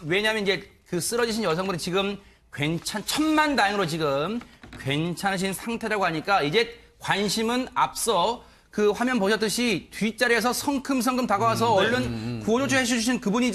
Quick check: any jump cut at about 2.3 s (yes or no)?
no